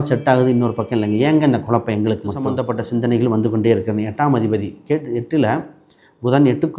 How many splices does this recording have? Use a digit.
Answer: 1